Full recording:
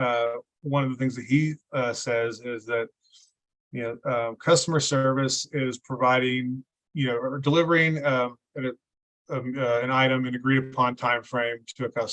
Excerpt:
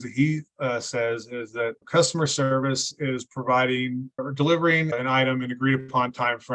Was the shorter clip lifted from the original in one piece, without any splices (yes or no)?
no